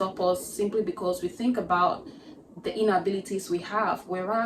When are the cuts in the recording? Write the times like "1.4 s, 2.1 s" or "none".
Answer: none